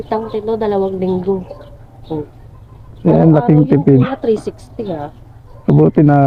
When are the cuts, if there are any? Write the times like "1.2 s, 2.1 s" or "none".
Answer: none